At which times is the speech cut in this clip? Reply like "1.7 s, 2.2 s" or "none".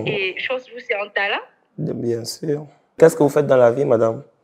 3.0 s